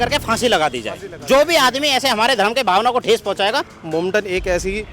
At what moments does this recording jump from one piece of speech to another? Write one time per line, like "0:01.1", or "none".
0:03.8